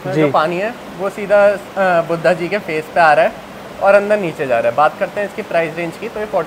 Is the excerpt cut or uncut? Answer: uncut